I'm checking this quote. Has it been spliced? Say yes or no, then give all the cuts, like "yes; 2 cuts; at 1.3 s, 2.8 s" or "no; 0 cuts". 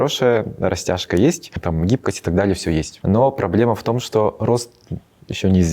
yes; 2 cuts; at 1.6 s, 2.9 s